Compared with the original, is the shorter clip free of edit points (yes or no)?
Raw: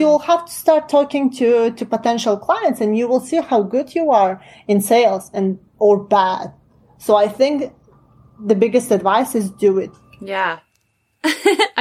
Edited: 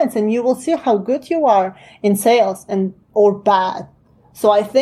yes